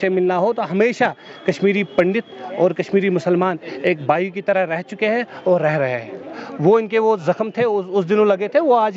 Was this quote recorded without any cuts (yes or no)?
yes